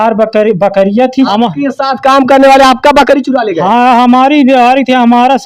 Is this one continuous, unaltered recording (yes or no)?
no